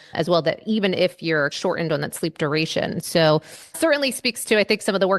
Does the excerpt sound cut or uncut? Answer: cut